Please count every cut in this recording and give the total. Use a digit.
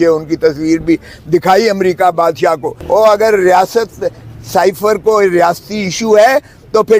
1